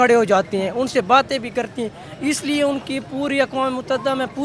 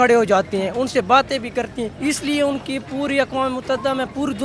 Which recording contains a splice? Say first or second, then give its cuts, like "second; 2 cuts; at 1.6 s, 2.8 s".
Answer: second; 1 cut; at 1.9 s